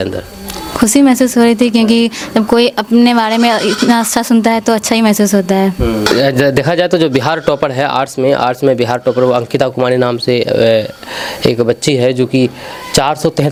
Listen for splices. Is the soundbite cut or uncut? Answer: uncut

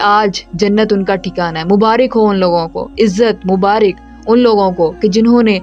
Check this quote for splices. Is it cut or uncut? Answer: uncut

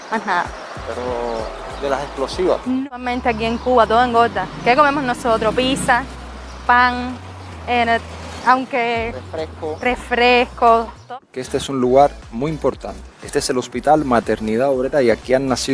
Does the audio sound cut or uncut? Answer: cut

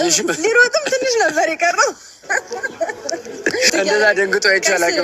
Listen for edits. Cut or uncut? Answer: cut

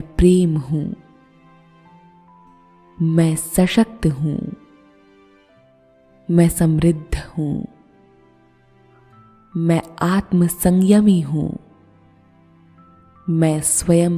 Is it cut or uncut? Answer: cut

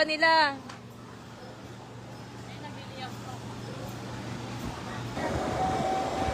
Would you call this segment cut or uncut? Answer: cut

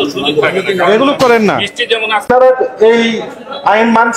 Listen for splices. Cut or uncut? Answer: cut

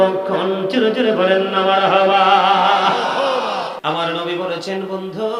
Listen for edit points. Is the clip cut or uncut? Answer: cut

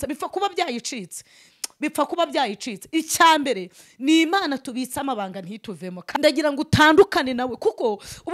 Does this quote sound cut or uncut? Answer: cut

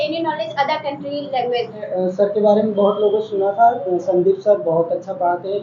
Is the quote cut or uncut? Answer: cut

